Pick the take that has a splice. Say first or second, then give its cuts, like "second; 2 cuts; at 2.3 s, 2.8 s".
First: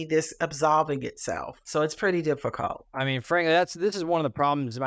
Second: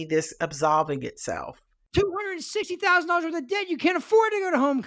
second; 1 cut; at 1.7 s